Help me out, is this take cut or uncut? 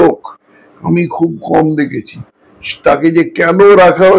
uncut